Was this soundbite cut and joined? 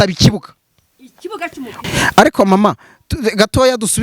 yes; 1 cut; at 1.8 s

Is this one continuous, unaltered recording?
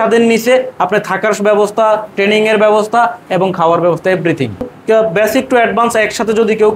no; 1 cut; at 4.7 s

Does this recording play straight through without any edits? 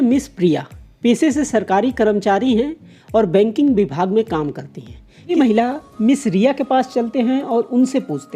no; 1 cut; at 5.3 s

